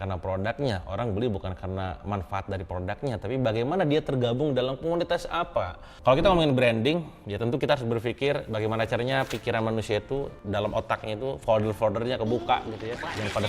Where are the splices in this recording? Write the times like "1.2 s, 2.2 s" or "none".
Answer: 5.9 s